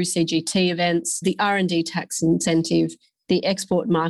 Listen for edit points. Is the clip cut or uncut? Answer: cut